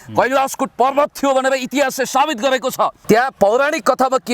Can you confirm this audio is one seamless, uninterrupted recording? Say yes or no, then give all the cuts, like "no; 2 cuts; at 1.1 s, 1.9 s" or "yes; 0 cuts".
no; 1 cut; at 3.0 s